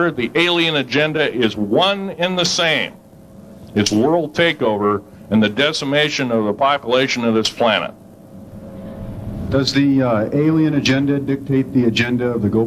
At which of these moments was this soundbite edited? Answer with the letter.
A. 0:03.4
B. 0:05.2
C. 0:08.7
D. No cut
C